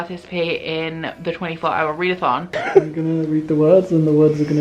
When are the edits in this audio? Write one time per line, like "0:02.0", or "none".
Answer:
0:02.5